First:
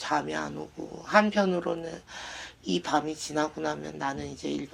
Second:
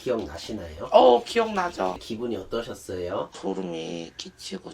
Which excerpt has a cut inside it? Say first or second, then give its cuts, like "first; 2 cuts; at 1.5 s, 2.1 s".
second; 2 cuts; at 2.0 s, 3.4 s